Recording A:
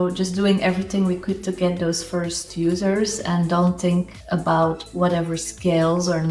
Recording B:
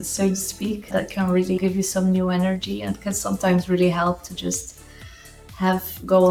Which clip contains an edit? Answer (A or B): A